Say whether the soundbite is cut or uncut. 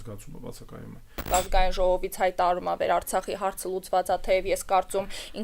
cut